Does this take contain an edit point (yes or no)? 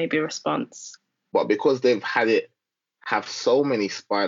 yes